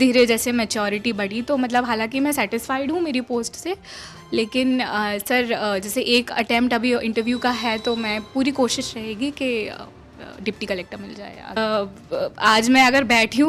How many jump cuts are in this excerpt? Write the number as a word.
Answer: one